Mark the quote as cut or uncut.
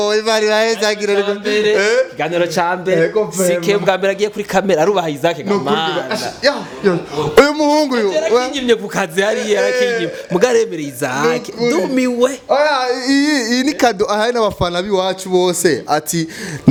uncut